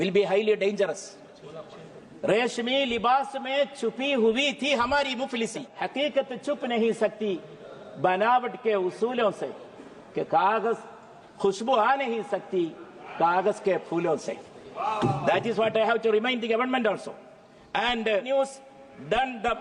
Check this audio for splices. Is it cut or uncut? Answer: cut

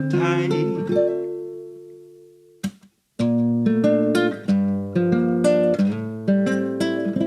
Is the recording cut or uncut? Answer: uncut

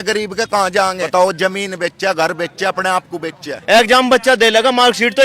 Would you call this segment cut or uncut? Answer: cut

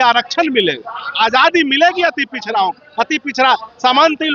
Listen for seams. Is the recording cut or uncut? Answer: uncut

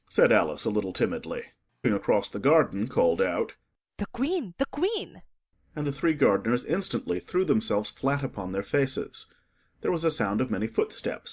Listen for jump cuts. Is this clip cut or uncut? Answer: uncut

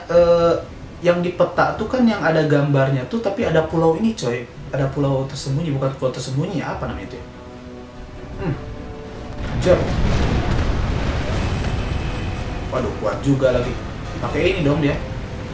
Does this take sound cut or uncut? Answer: uncut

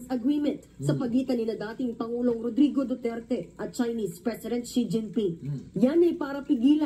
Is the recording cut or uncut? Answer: cut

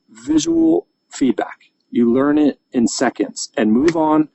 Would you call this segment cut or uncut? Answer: uncut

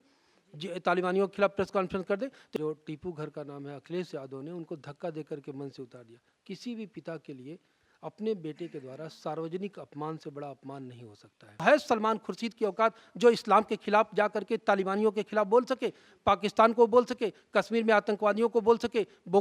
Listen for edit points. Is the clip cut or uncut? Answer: cut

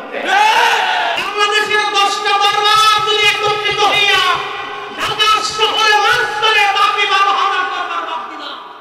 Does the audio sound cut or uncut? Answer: cut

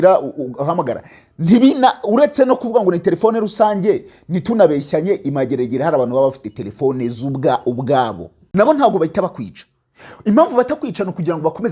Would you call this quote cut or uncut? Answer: cut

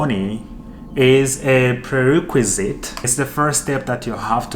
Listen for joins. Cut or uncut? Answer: cut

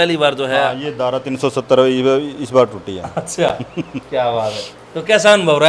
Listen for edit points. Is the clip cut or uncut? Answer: uncut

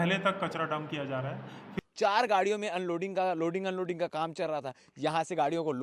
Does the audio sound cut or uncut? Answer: cut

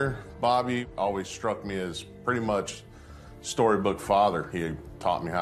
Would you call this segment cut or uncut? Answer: cut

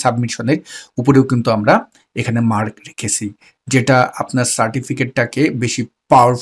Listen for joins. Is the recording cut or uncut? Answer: uncut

